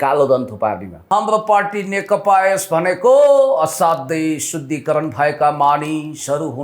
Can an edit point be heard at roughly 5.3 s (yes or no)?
no